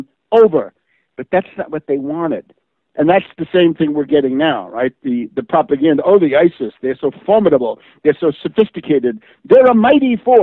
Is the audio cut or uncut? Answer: cut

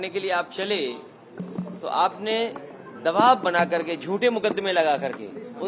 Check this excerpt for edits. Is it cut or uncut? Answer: uncut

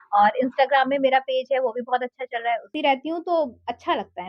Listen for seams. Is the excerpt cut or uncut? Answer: cut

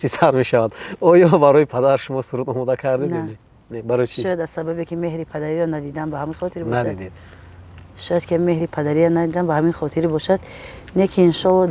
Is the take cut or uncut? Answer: uncut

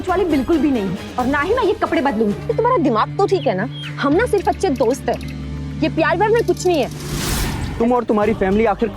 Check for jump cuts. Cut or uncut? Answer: cut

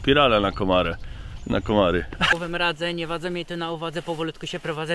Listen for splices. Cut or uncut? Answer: cut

